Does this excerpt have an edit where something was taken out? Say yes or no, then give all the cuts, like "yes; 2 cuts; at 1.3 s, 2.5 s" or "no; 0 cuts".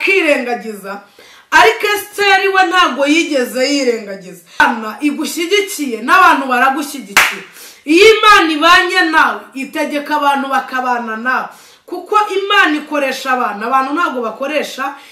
yes; 1 cut; at 4.6 s